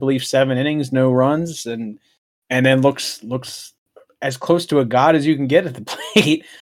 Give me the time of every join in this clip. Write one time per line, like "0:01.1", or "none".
0:02.3